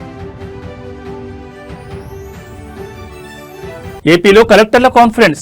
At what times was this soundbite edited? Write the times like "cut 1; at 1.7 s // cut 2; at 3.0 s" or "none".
cut 1; at 4.0 s